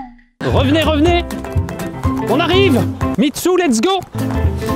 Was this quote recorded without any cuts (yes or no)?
no